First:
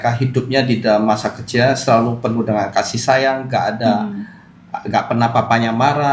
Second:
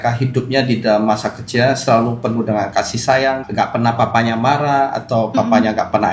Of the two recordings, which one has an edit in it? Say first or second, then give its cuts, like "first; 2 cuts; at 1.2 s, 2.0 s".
second; 1 cut; at 3.4 s